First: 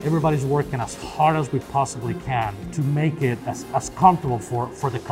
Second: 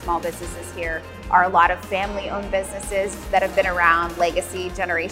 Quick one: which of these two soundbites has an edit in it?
first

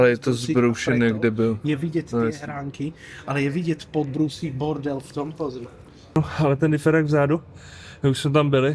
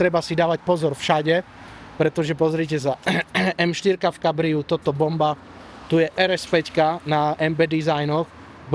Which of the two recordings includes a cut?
first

